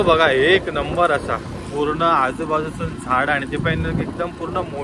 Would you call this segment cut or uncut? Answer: uncut